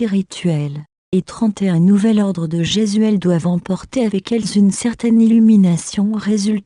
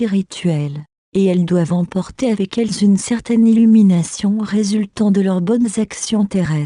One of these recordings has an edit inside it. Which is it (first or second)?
second